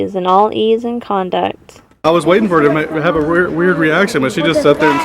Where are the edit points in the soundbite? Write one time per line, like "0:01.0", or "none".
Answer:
0:01.9